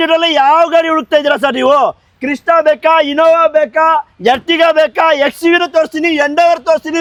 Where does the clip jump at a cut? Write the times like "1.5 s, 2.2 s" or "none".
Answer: none